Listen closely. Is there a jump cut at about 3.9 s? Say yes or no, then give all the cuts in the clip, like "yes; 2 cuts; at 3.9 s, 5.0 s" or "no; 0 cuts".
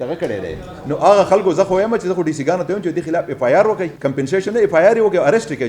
yes; 1 cut; at 3.9 s